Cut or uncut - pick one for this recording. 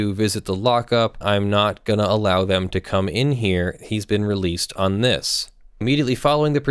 cut